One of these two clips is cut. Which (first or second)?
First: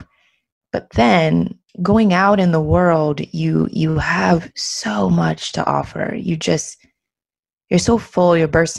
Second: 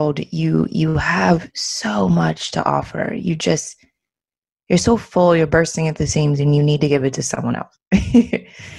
first